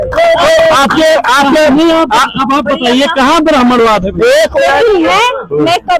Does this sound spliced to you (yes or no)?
yes